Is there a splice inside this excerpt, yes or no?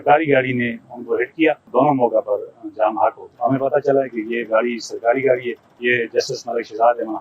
yes